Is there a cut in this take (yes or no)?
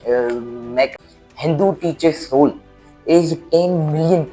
yes